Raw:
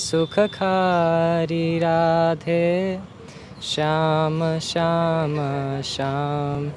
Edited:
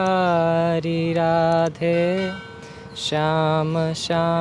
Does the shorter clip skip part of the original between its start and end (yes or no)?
no